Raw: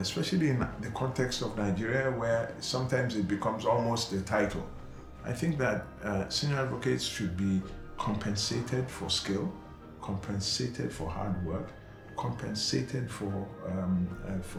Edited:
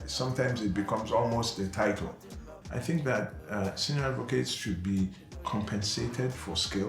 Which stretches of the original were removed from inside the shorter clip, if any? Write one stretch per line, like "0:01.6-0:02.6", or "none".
none